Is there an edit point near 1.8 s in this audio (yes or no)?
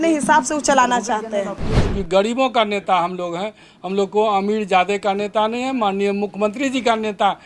yes